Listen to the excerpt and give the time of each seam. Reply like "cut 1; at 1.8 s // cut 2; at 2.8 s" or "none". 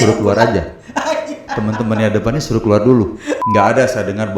cut 1; at 3.4 s